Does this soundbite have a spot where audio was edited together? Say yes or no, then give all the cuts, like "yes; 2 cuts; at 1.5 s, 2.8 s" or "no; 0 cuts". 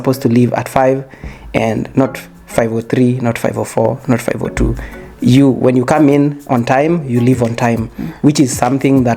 no; 0 cuts